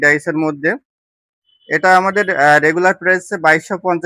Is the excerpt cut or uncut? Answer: uncut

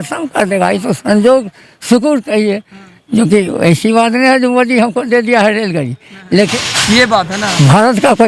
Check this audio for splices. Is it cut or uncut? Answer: cut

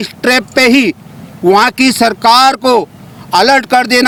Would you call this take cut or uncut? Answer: uncut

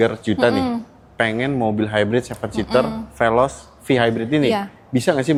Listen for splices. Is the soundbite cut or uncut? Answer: uncut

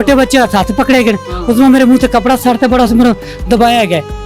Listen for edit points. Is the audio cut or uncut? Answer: uncut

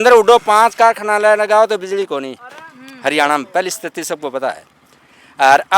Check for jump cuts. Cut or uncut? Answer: uncut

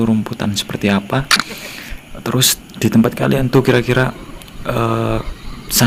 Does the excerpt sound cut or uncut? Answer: uncut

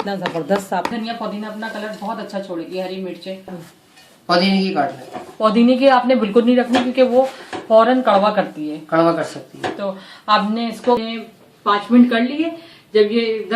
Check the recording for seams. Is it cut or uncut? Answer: cut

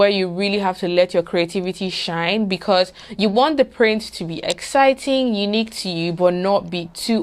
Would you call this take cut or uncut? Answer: uncut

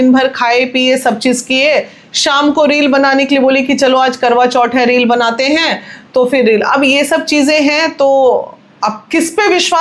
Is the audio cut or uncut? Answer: uncut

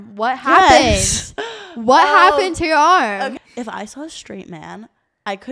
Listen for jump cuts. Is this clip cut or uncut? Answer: cut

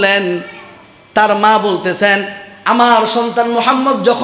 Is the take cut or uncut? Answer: uncut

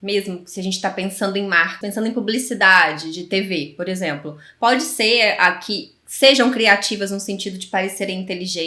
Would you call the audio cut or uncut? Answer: cut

